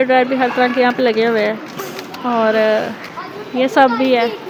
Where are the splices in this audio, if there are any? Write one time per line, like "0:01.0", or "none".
none